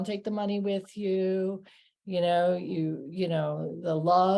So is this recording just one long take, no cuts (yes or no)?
yes